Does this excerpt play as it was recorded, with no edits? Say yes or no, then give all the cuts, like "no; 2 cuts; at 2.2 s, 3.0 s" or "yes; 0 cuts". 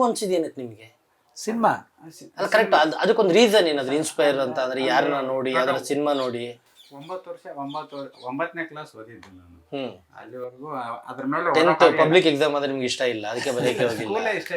yes; 0 cuts